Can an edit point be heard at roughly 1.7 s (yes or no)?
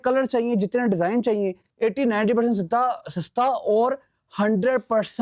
yes